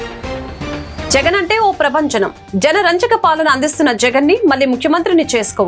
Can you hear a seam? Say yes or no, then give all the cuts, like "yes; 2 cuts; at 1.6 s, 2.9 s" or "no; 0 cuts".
yes; 1 cut; at 1.1 s